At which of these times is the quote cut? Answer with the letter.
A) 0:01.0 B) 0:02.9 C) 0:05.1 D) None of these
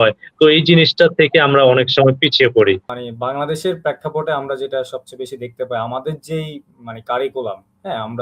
B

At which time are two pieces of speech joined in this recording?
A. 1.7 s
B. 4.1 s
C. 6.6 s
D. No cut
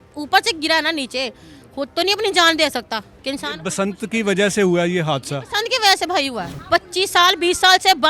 D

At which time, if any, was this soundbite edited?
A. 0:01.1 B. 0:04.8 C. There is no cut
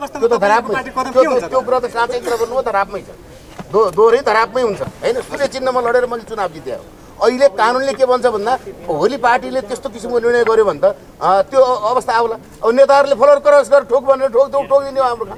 B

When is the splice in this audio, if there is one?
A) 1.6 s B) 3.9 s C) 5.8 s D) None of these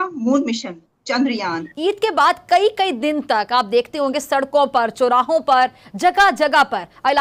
A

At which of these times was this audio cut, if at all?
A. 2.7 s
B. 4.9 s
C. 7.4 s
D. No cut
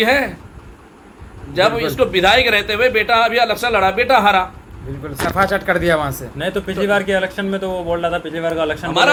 D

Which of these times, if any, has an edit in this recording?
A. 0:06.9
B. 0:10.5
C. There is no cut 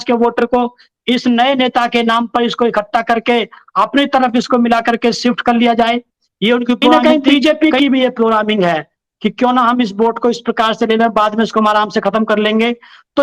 A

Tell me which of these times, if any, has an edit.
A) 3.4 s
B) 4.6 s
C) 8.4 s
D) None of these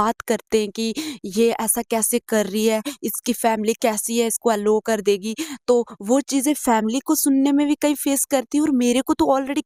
D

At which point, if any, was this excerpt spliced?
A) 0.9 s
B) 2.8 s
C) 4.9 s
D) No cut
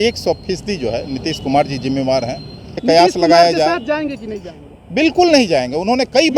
B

